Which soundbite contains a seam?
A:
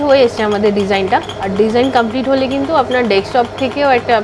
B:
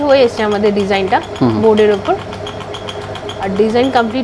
A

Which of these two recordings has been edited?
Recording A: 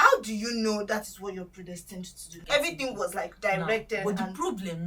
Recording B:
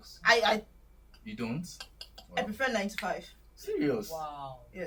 A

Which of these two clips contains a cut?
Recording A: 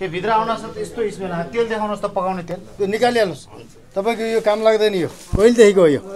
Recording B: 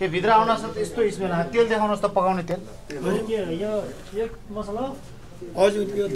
A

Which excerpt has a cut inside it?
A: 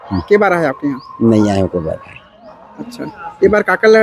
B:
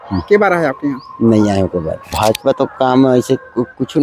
B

